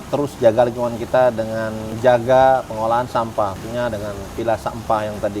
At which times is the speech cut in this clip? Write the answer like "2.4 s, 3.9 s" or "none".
1.9 s, 3.6 s